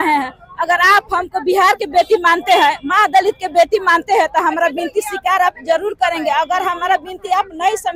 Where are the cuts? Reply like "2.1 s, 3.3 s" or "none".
none